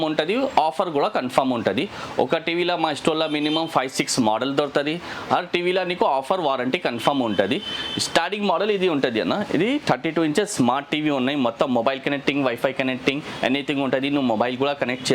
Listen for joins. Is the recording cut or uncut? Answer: uncut